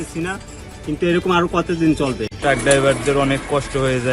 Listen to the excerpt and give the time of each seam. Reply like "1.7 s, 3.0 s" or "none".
2.3 s